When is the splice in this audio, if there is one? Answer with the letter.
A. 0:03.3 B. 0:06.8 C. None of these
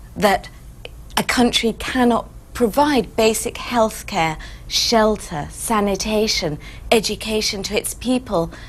B